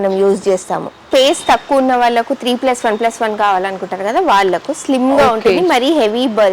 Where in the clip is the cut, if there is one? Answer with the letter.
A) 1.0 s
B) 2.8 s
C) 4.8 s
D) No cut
A